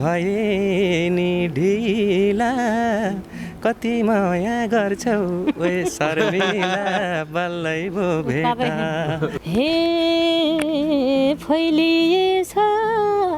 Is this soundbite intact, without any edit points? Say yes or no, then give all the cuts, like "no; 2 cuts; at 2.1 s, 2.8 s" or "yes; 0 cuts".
no; 1 cut; at 9.4 s